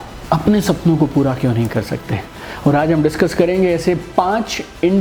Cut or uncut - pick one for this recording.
uncut